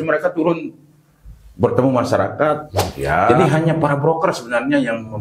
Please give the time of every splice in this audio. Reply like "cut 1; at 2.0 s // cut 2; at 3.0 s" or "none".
cut 1; at 3.3 s